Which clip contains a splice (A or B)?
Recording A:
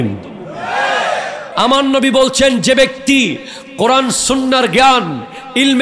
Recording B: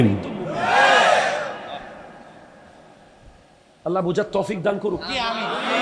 A